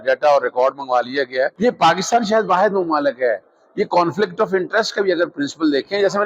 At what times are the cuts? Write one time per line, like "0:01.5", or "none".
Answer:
0:01.5